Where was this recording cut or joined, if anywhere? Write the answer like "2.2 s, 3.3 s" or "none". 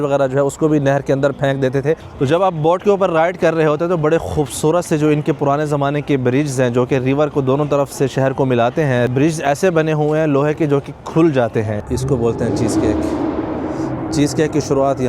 2.1 s, 11.8 s